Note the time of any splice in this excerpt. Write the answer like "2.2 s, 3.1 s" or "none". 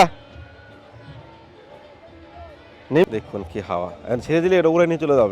3.0 s